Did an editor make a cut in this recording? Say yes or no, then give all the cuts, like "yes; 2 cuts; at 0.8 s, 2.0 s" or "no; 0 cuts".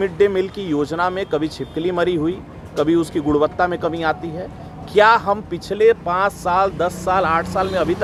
no; 0 cuts